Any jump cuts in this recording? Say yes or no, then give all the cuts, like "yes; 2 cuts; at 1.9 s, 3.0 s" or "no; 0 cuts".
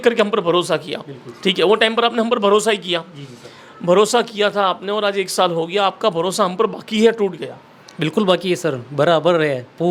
no; 0 cuts